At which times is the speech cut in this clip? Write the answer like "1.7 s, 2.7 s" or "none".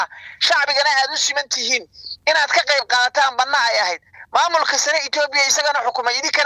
none